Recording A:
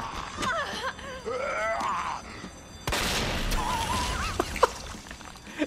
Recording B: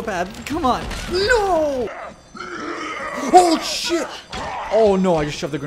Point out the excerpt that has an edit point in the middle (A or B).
B